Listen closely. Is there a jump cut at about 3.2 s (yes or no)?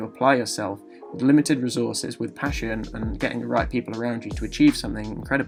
no